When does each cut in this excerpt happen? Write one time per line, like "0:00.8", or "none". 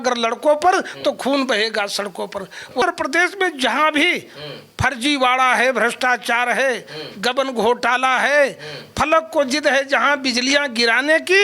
0:02.8